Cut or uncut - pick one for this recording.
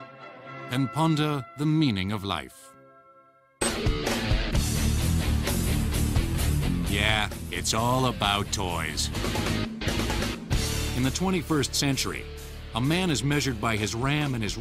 uncut